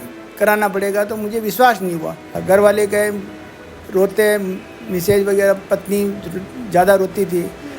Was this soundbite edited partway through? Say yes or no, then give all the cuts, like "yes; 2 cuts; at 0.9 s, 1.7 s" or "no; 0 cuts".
yes; 1 cut; at 2.3 s